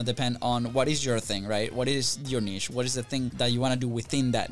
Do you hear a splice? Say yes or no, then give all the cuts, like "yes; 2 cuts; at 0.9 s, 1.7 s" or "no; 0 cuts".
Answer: yes; 1 cut; at 3.3 s